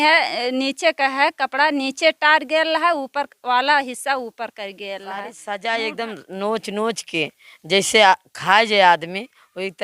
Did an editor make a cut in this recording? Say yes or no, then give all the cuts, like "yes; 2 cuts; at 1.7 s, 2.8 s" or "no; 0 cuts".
yes; 1 cut; at 5.3 s